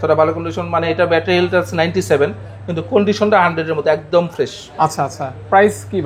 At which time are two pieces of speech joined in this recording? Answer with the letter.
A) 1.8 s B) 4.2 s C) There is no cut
C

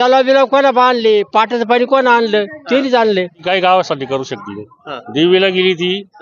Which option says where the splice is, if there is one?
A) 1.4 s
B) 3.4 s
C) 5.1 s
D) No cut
B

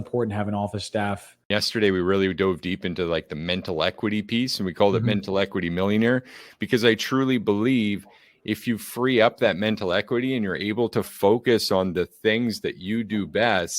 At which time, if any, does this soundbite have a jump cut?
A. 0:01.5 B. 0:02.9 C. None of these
A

